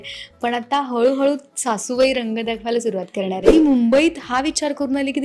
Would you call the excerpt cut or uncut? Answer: cut